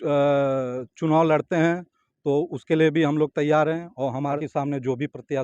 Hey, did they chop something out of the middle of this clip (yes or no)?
yes